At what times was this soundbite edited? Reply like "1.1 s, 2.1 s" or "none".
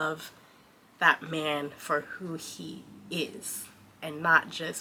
none

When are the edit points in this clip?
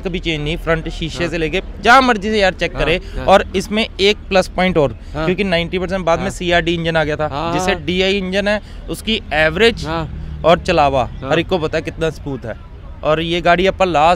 none

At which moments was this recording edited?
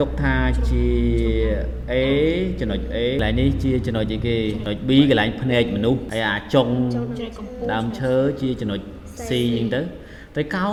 none

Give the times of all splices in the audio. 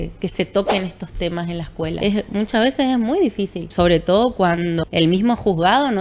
2.0 s, 3.7 s, 4.8 s

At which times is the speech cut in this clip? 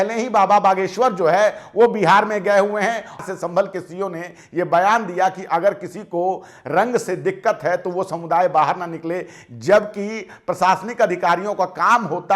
3.2 s

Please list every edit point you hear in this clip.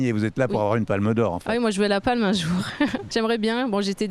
3.0 s

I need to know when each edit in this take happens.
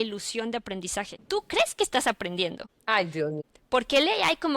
1.2 s, 2.7 s, 3.5 s

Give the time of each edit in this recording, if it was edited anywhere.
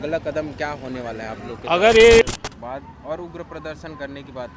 2.2 s

